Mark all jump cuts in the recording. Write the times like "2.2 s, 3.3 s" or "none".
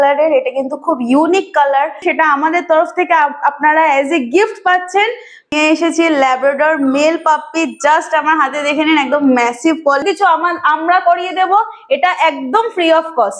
2.0 s, 5.5 s, 10.0 s